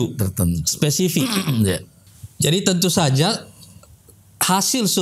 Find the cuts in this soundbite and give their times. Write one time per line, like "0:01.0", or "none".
0:02.3